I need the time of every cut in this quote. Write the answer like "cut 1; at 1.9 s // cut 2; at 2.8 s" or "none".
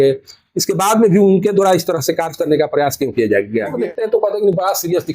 cut 1; at 3.7 s